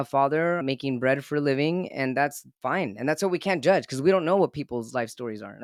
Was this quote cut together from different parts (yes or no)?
no